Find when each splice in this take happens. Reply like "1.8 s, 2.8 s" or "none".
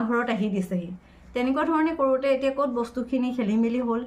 none